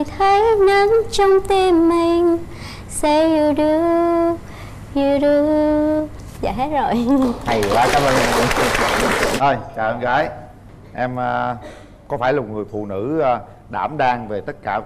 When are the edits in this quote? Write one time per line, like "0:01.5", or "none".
0:09.4